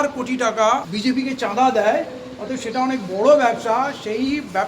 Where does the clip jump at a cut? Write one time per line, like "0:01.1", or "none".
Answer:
0:00.9

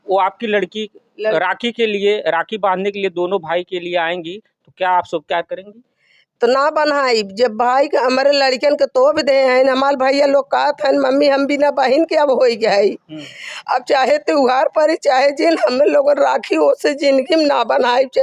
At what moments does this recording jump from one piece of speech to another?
none

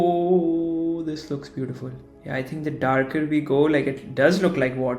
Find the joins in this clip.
none

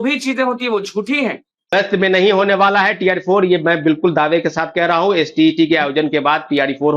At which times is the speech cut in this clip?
0:01.7

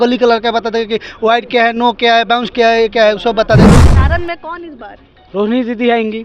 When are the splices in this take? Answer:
0:03.8

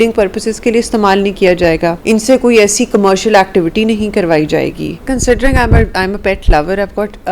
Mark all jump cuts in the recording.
0:02.0
0:05.1

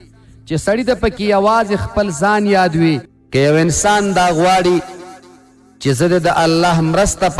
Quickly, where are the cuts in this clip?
0:03.1

